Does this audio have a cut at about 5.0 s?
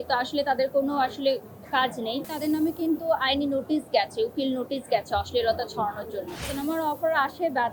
no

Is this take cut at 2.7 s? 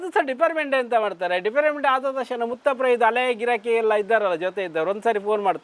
no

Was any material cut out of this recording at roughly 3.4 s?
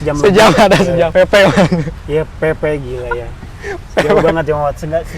no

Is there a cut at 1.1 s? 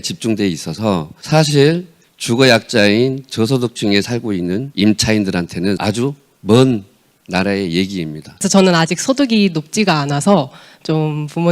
yes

